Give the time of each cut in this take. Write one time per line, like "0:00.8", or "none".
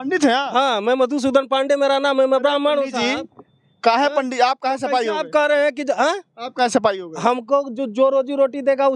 none